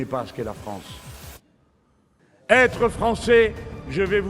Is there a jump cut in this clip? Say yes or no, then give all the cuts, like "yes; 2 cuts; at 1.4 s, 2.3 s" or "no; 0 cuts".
yes; 1 cut; at 2.2 s